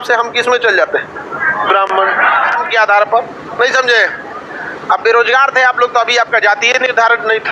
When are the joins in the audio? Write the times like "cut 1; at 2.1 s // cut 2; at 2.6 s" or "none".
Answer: cut 1; at 2.6 s

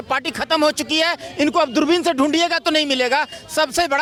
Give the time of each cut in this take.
none

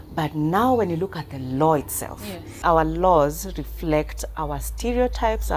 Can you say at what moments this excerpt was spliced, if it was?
cut 1; at 2.6 s

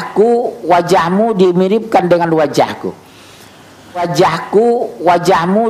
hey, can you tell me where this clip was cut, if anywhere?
cut 1; at 4.0 s

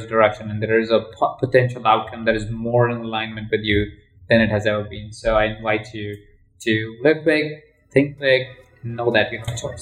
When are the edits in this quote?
none

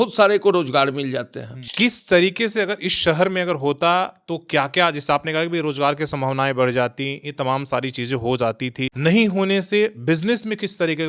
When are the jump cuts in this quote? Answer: cut 1; at 1.5 s // cut 2; at 8.9 s

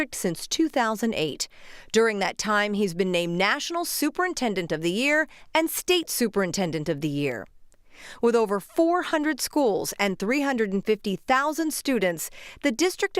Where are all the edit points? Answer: cut 1; at 11.7 s

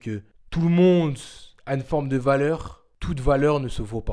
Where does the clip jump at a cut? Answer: none

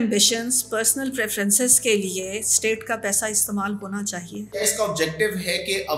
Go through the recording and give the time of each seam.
cut 1; at 4.4 s

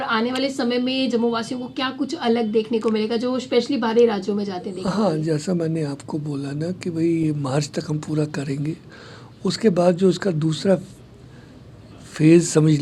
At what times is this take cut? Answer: none

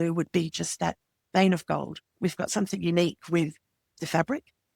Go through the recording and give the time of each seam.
cut 1; at 2.0 s // cut 2; at 3.8 s

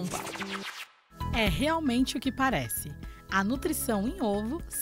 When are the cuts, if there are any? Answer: cut 1; at 0.9 s

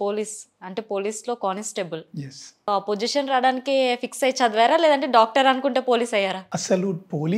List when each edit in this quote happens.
cut 1; at 2.7 s

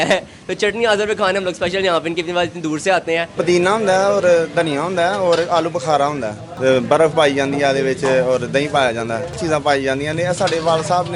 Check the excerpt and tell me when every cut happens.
cut 1; at 3.3 s // cut 2; at 6.4 s // cut 3; at 9.4 s

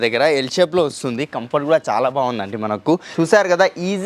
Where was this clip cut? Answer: cut 1; at 3.1 s

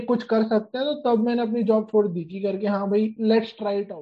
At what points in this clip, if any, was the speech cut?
cut 1; at 3.1 s

